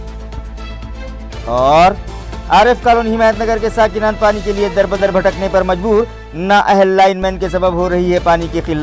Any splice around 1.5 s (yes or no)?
yes